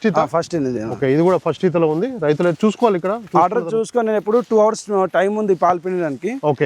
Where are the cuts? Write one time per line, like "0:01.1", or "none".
none